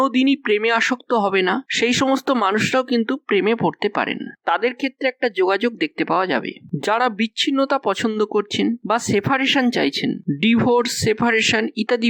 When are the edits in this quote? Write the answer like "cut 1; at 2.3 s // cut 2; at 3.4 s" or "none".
none